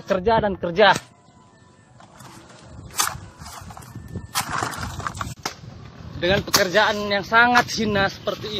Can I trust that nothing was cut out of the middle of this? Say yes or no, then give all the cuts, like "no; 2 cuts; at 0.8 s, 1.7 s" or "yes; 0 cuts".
no; 1 cut; at 5.4 s